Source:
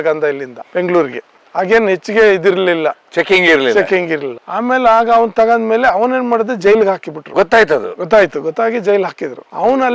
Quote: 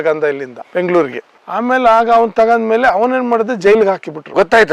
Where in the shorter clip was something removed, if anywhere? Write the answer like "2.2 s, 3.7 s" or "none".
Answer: 1.4 s

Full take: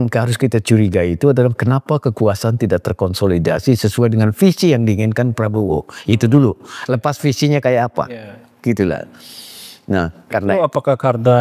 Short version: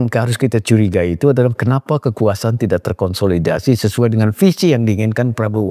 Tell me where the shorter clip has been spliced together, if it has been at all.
none

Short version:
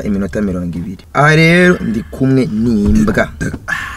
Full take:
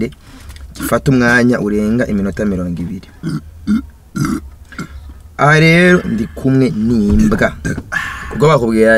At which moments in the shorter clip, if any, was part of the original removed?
0.9 s

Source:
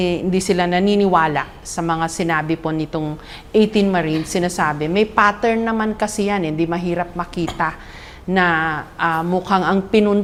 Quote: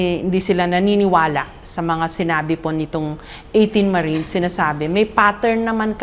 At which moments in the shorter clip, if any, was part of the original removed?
none

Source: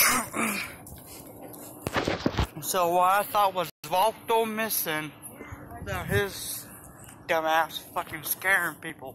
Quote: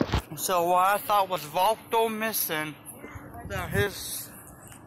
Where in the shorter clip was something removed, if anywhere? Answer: 1.4 s

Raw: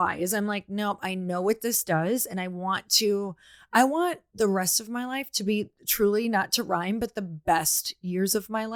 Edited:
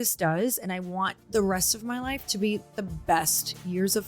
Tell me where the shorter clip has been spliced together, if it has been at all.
1.2 s, 2.8 s

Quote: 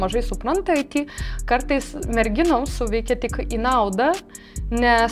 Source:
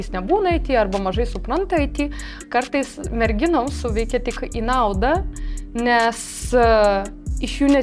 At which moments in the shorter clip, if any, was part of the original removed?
none

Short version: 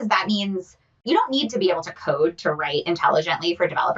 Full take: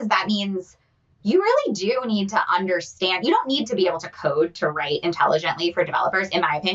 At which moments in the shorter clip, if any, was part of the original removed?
1.0 s

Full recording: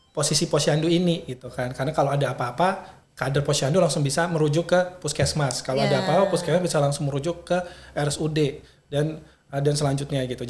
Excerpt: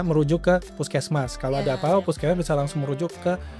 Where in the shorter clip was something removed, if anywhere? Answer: none

